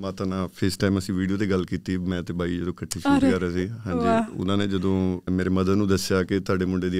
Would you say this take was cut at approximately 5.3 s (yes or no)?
yes